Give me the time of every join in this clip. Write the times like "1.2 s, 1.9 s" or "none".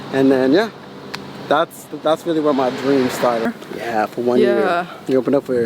3.5 s